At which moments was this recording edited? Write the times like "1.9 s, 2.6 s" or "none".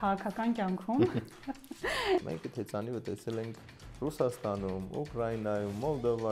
2.2 s